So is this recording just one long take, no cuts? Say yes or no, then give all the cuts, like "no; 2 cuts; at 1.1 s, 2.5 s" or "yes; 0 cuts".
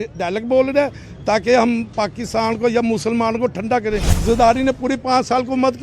no; 1 cut; at 4.1 s